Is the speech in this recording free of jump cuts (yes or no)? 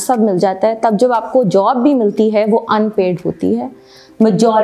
yes